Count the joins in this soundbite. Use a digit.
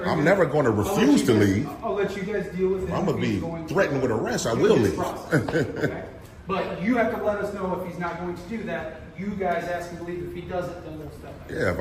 0